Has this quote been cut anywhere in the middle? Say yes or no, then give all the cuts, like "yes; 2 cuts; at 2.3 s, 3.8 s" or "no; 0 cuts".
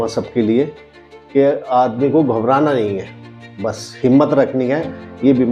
no; 0 cuts